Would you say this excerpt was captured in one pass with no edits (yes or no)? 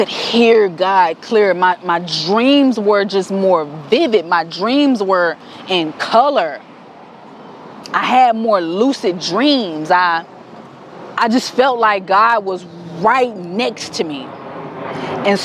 yes